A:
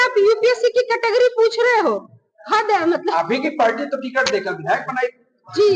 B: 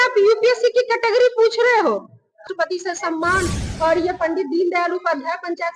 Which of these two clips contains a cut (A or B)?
B